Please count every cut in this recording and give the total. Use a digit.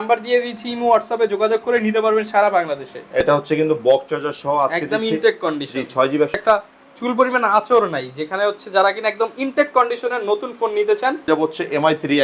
3